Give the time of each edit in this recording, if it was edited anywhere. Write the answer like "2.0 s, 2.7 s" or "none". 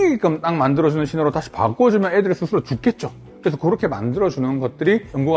none

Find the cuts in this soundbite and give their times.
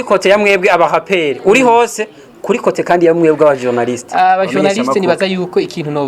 none

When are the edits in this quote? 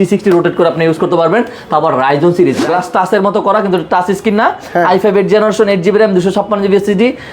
2.6 s

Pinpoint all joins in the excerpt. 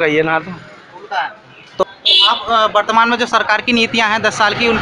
1.8 s

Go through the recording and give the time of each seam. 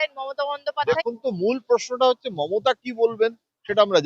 1.1 s

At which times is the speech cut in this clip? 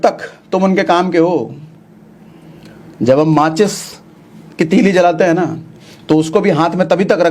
none

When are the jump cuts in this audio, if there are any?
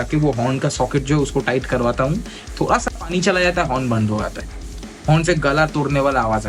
none

